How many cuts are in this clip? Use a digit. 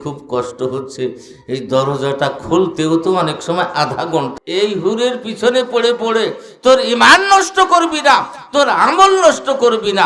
1